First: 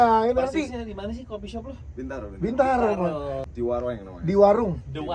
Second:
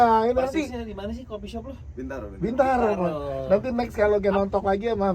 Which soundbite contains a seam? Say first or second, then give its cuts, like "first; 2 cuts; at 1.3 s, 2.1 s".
first; 1 cut; at 3.4 s